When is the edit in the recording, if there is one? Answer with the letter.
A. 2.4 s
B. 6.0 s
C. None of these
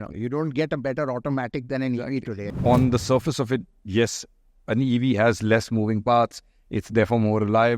A